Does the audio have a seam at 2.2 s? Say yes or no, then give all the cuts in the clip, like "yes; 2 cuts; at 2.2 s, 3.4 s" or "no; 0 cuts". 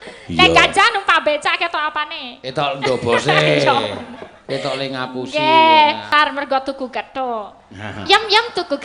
no; 1 cut; at 6.0 s